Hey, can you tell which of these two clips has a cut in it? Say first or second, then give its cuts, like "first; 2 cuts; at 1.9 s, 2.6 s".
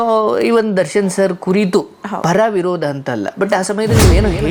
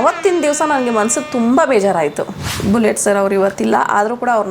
second; 1 cut; at 2.4 s